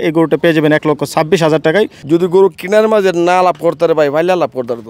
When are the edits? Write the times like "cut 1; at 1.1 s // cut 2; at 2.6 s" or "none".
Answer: cut 1; at 2.0 s